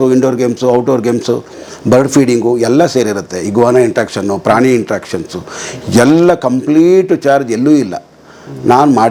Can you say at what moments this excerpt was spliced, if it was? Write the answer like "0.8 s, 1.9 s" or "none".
none